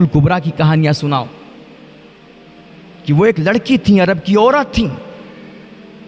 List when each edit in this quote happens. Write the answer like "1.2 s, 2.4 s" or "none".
none